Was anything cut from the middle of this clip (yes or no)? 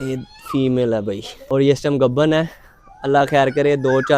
yes